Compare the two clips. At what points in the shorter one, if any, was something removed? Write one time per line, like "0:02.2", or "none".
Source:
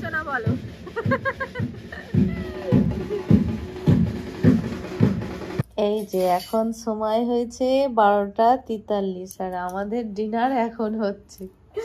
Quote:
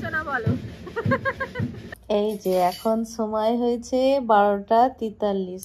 0:01.9